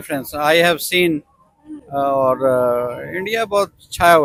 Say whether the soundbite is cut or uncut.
uncut